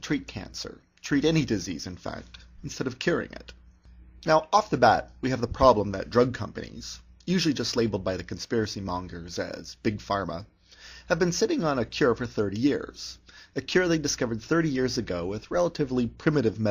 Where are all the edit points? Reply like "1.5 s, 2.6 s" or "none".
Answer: 15.7 s